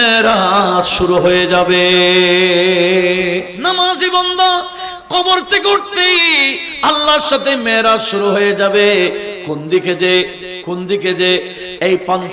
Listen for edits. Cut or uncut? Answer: cut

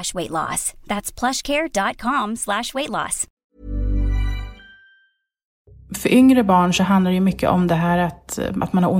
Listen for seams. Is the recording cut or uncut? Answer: cut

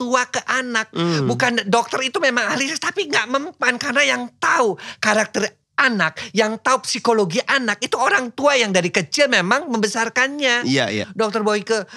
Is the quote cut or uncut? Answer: cut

